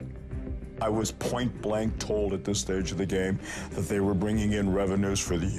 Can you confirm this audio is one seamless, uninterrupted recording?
no; 1 cut; at 3.1 s

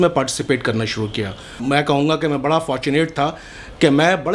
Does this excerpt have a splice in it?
yes; 1 cut; at 1.6 s

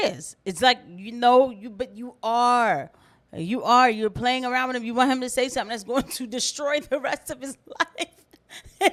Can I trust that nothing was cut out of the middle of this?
yes; 0 cuts

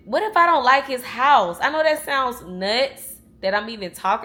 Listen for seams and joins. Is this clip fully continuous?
yes; 0 cuts

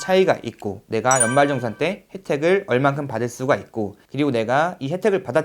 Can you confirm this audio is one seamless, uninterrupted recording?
no; 1 cut; at 4.0 s

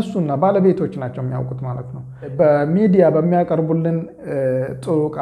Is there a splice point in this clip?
yes; 1 cut; at 2.3 s

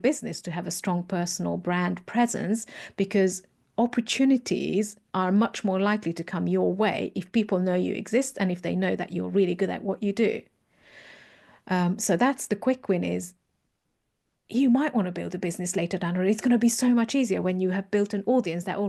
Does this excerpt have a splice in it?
no; 0 cuts

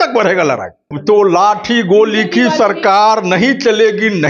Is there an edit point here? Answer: yes; 1 cut; at 0.9 s

